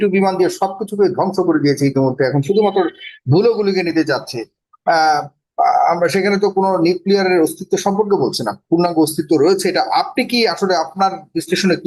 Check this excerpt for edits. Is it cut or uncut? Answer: uncut